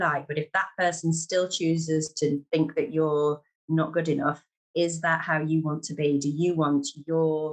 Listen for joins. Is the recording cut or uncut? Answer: uncut